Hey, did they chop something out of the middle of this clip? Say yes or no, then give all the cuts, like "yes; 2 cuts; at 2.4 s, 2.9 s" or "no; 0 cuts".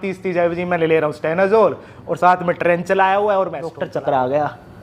yes; 1 cut; at 3.7 s